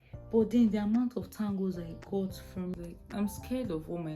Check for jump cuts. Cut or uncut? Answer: cut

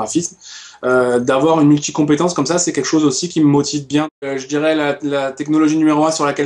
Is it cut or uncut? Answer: cut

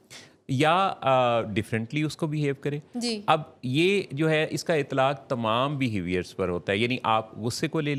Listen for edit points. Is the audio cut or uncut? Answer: uncut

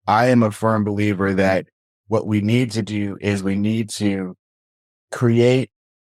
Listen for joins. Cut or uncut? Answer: uncut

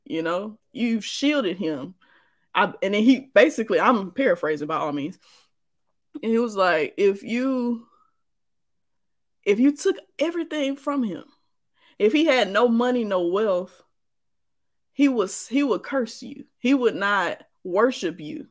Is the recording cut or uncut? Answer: uncut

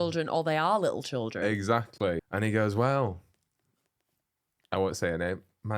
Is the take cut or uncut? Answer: cut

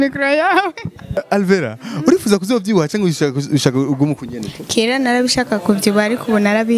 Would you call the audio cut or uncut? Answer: cut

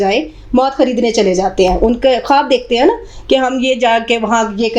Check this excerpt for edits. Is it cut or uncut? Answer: uncut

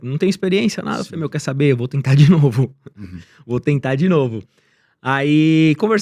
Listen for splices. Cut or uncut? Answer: uncut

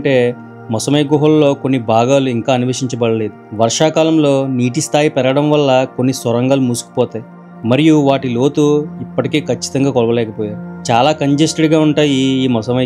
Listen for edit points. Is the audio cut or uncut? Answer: uncut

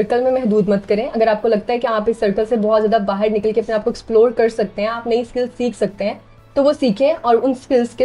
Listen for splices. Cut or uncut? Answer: uncut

